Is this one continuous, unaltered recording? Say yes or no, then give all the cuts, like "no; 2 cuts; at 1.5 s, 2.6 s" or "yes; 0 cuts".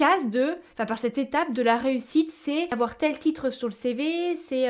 no; 1 cut; at 2.7 s